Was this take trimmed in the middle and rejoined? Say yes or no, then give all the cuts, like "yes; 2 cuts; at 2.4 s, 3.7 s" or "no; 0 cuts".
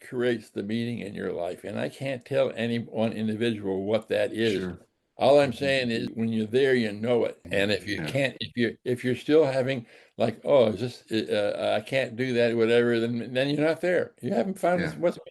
yes; 2 cuts; at 6.1 s, 7.4 s